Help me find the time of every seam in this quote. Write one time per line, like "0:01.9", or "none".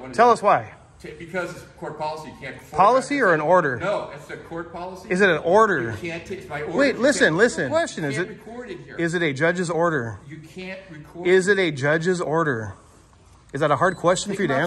0:07.8